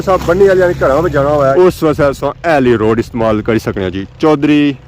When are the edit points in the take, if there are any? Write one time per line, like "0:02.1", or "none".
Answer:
0:01.5

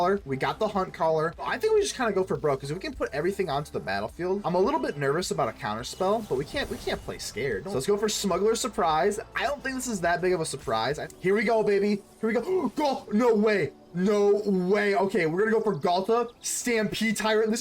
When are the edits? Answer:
0:01.5
0:04.4
0:07.7
0:11.0

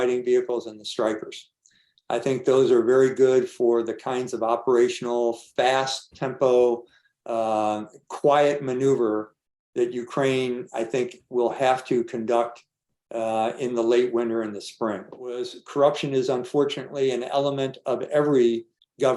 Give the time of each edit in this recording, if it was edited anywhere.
0:15.6

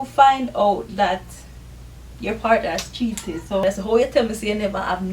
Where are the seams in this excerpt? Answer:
0:03.6

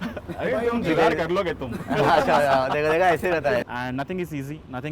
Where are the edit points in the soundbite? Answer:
0:03.6

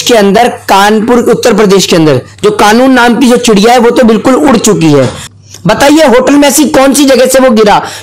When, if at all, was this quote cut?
0:05.3

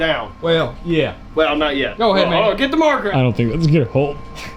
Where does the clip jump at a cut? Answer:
0:03.1

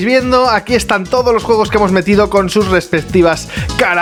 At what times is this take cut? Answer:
none

